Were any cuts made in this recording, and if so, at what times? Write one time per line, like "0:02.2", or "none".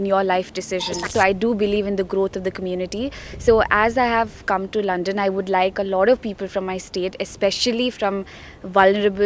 0:01.1